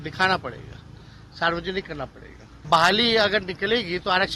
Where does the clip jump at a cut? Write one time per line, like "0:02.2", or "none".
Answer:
0:02.7